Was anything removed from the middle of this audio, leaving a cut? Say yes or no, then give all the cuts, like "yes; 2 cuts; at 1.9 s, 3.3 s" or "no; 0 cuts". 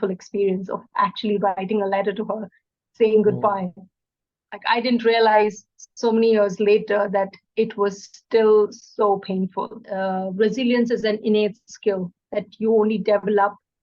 yes; 1 cut; at 9.8 s